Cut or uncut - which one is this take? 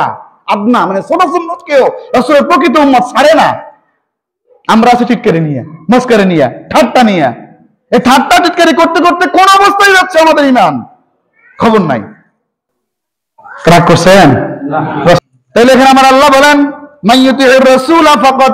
cut